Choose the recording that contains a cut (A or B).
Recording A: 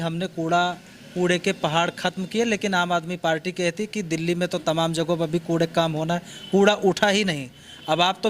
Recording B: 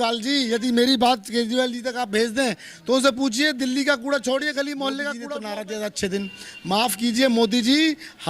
B